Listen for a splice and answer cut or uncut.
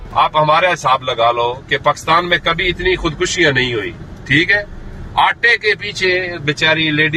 uncut